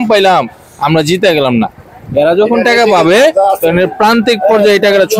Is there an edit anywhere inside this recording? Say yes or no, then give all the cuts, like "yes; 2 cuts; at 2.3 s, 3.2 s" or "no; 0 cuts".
no; 0 cuts